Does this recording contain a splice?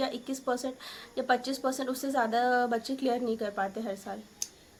no; 0 cuts

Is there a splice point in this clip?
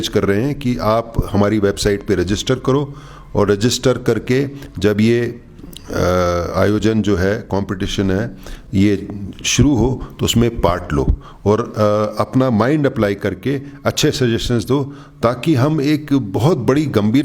no; 0 cuts

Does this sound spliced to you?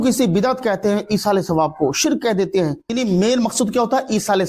yes; 1 cut; at 2.8 s

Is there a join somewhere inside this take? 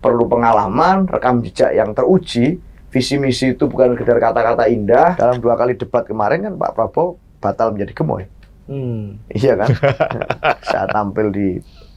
yes; 1 cut; at 5.2 s

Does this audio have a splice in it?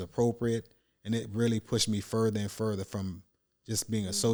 no; 0 cuts

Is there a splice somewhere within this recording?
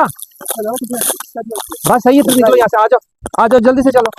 no; 0 cuts

